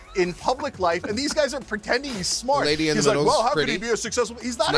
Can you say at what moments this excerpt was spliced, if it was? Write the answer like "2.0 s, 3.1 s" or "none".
none